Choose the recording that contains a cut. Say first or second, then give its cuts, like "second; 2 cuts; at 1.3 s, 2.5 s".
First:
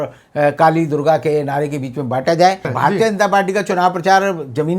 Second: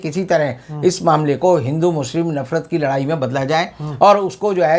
first; 1 cut; at 2.7 s